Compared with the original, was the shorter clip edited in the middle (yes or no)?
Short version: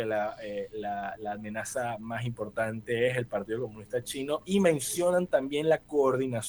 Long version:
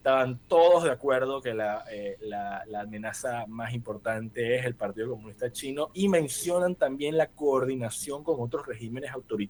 no